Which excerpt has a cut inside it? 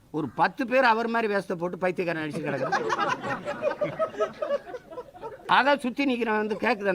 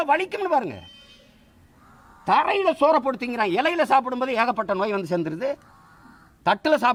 first; 1 cut; at 5.3 s

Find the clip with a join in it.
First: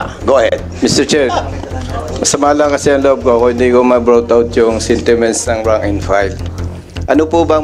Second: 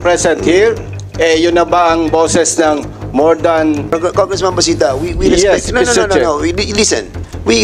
second; 1 cut; at 3.9 s

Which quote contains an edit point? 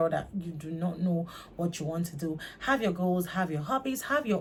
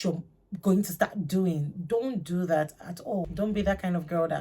second; 1 cut; at 3.3 s

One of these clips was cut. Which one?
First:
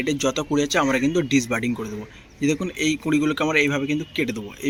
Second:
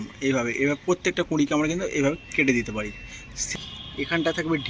second; 1 cut; at 3.5 s

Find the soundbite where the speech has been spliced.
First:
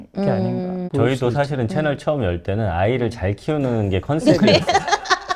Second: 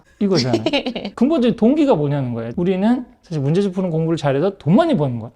second; 1 cut; at 2.4 s

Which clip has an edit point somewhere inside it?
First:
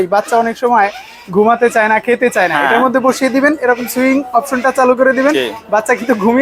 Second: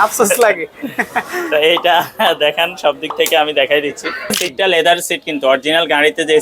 second; 1 cut; at 4.4 s

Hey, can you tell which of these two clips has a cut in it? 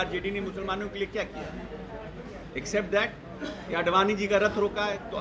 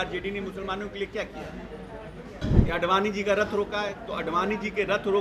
second; 1 cut; at 2.4 s

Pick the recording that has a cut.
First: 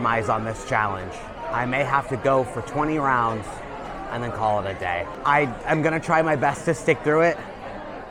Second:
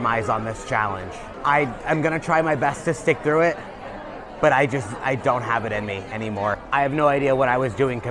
second; 2 cuts; at 1.3 s, 6.6 s

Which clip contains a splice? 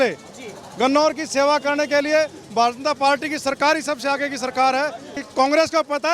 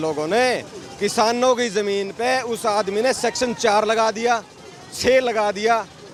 first; 1 cut; at 5.1 s

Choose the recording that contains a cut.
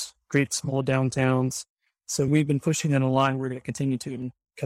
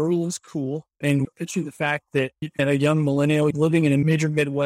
second; 2 cuts; at 1.0 s, 2.6 s

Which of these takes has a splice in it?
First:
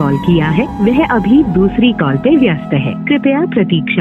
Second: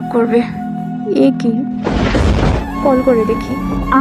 second; 1 cut; at 2.6 s

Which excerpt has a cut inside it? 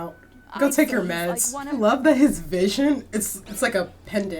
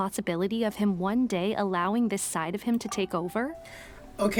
first; 1 cut; at 1.7 s

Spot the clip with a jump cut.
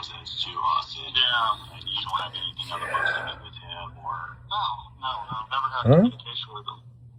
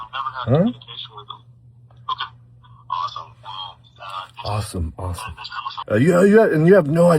second; 1 cut; at 5.7 s

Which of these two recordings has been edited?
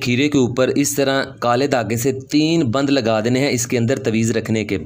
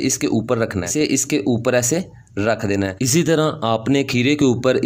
second; 2 cuts; at 0.9 s, 3.1 s

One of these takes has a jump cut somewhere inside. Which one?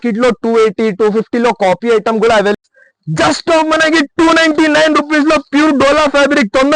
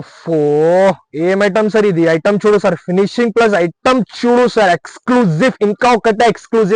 first; 1 cut; at 2.5 s

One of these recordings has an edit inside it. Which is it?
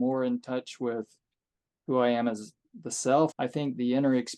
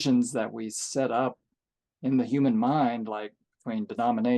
first; 1 cut; at 3.3 s

